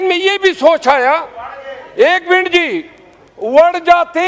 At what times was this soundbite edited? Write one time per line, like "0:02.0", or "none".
none